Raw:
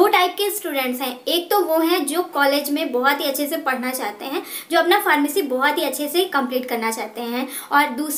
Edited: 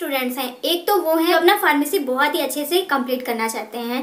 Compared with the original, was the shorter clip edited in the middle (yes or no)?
yes